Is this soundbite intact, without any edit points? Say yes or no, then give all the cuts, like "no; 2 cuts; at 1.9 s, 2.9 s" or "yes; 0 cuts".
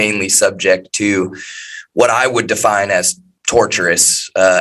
yes; 0 cuts